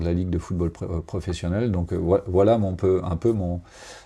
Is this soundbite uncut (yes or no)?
yes